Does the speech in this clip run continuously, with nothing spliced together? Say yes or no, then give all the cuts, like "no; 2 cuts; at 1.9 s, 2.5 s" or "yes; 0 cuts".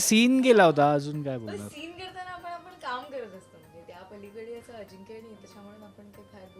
yes; 0 cuts